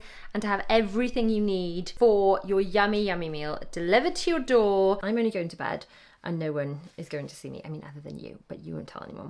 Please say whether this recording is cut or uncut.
cut